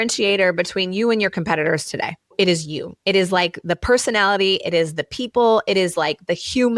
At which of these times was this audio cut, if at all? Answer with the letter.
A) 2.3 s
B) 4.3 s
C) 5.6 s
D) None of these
A